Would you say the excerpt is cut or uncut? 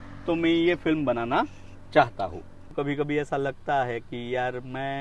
cut